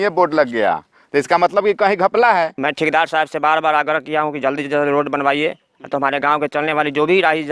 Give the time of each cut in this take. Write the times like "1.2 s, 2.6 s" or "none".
2.5 s

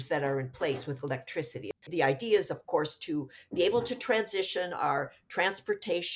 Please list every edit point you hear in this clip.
none

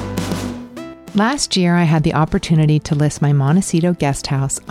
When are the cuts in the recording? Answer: 1.0 s

